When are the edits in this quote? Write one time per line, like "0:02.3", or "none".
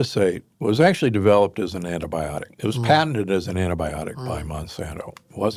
none